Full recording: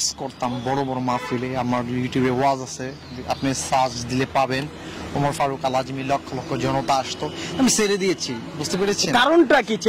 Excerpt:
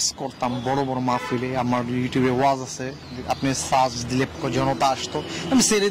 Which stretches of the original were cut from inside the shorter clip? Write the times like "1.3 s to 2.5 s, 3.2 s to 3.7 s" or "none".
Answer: 4.3 s to 6.4 s